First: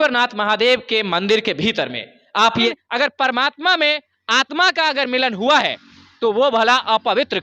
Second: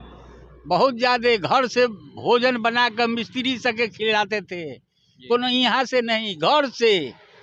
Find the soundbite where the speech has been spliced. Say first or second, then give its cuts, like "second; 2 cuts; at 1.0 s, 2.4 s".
first; 1 cut; at 2.7 s